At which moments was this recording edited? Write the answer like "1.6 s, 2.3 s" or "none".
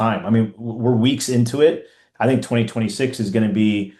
none